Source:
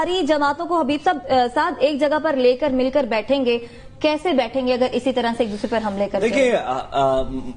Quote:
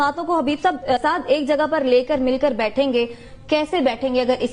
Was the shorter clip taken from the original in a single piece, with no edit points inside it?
no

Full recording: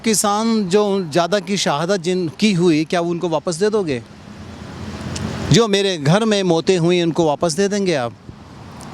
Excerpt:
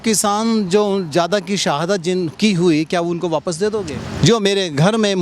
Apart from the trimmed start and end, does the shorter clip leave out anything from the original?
yes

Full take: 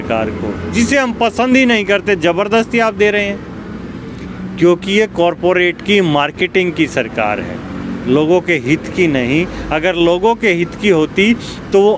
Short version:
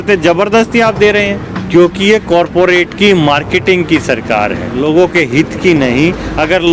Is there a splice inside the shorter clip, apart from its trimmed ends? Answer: yes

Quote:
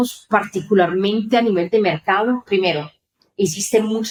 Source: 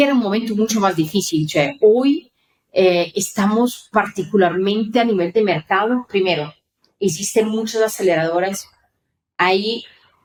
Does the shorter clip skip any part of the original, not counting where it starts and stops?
no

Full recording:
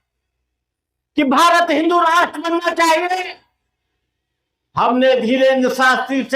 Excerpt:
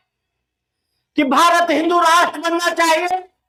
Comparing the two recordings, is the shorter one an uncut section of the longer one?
yes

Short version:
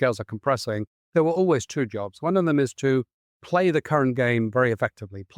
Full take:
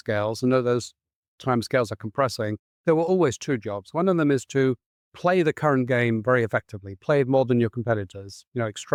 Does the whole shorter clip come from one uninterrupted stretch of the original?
yes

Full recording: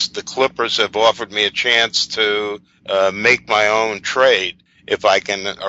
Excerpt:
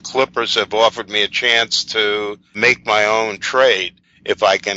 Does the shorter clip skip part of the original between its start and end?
yes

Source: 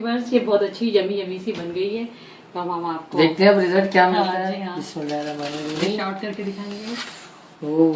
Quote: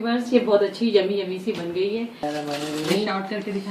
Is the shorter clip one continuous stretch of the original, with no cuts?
no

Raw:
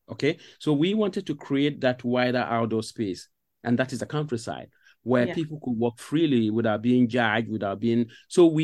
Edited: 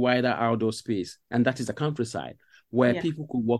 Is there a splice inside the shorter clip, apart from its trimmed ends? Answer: yes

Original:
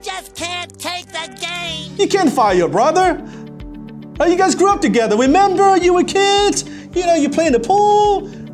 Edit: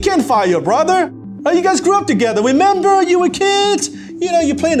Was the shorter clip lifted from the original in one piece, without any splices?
no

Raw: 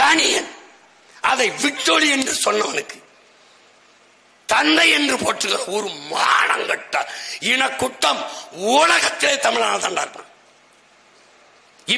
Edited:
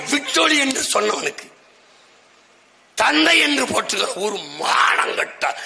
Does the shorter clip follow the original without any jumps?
yes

